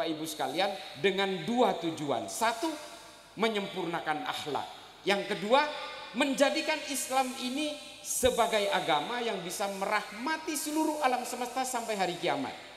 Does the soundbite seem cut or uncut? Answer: uncut